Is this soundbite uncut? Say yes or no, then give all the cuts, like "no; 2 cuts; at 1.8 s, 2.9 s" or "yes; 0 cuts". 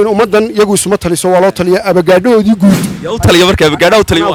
yes; 0 cuts